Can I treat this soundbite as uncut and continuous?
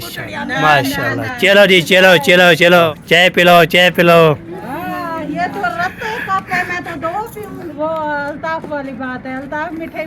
no; 2 cuts; at 2.9 s, 7.7 s

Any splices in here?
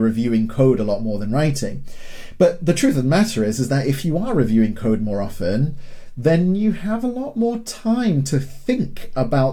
no; 0 cuts

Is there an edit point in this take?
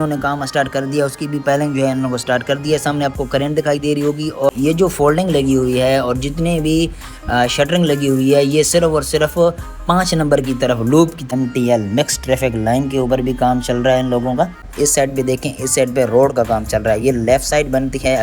yes; 3 cuts; at 4.5 s, 11.2 s, 14.7 s

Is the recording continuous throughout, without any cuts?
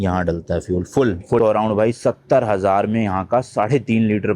no; 1 cut; at 1.4 s

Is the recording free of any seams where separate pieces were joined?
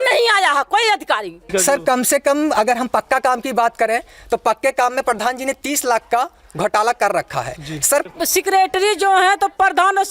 no; 2 cuts; at 1.4 s, 8.1 s

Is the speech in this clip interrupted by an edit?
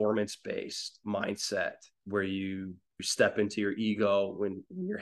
yes; 3 cuts; at 1.0 s, 1.9 s, 3.1 s

